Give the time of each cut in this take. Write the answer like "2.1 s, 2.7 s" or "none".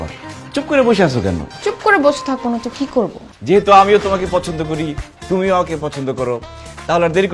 1.5 s